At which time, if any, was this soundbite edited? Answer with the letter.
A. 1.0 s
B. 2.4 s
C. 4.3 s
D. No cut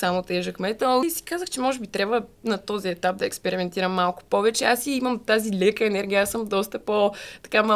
A